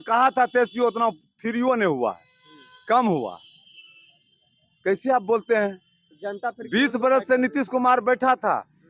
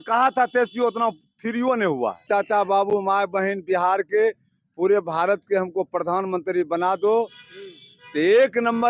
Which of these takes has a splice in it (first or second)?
second